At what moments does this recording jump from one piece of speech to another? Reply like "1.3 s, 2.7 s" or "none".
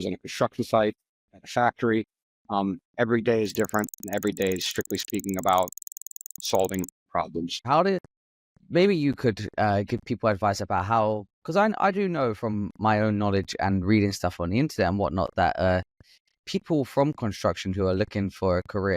7.6 s